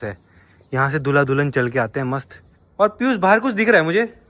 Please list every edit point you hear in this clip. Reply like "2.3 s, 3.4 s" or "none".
2.6 s